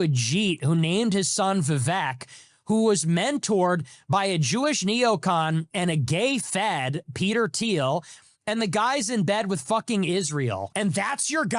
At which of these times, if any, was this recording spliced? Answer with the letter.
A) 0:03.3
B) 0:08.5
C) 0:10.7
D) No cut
C